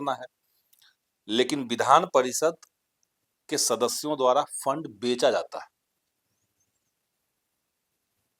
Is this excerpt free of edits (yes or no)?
yes